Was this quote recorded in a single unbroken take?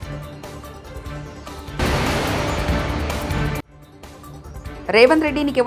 no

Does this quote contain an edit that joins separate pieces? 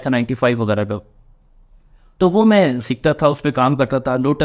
no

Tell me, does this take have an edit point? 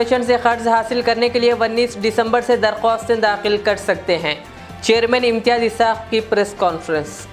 no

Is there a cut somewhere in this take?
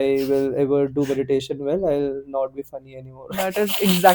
no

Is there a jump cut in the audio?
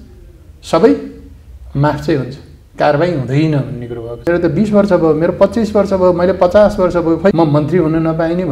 yes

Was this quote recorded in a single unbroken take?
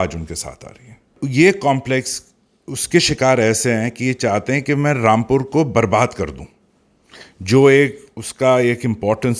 no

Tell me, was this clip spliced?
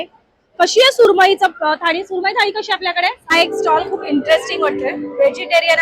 yes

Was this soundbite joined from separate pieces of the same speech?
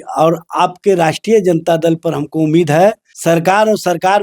yes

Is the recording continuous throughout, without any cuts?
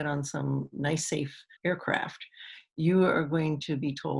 no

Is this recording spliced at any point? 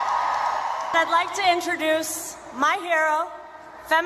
no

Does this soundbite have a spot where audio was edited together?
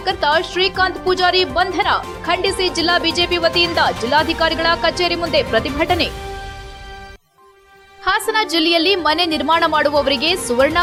no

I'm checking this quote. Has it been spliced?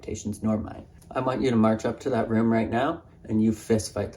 yes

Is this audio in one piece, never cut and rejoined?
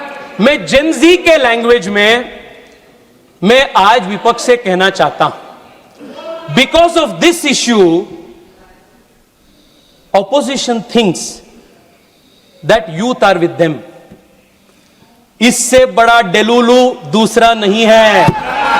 yes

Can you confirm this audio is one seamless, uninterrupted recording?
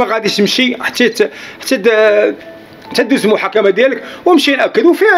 yes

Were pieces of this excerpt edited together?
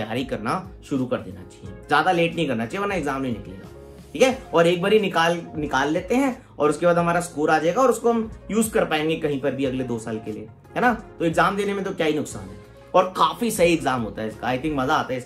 no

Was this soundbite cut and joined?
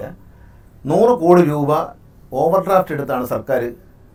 no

